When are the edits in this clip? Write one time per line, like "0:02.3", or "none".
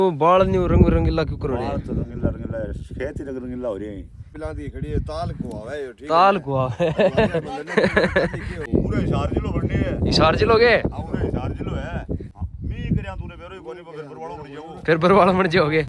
0:04.3
0:08.6
0:12.3